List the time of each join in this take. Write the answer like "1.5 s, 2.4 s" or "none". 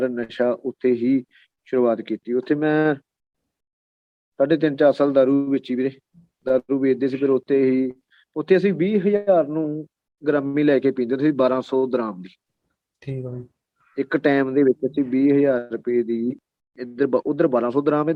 none